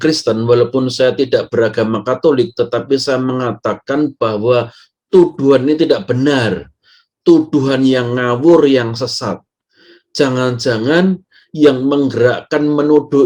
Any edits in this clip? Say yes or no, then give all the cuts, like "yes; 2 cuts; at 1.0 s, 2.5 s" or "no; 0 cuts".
no; 0 cuts